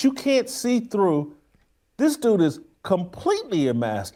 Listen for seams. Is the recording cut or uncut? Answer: uncut